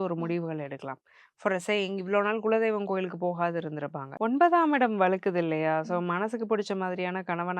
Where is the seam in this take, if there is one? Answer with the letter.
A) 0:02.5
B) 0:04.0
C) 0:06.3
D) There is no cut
B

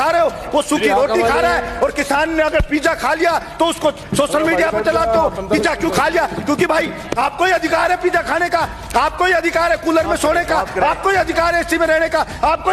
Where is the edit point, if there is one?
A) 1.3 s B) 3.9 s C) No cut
C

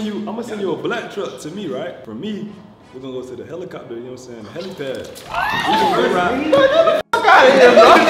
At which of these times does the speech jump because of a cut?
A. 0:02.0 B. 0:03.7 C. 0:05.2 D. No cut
A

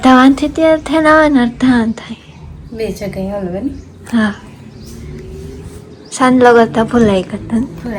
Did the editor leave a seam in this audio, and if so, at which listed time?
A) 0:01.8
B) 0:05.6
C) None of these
C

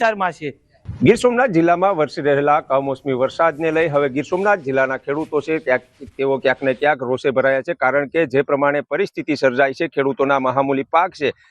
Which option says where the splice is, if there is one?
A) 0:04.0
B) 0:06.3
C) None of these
B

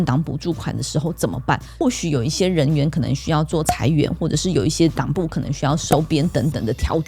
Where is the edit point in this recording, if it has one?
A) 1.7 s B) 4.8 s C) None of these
A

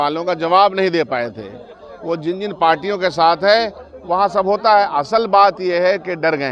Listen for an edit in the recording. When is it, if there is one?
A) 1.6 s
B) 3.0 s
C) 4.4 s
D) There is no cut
D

